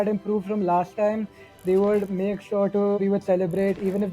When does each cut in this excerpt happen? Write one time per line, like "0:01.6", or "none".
0:03.0